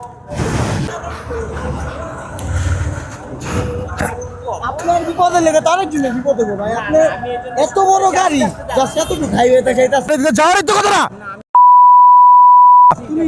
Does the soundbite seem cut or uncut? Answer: cut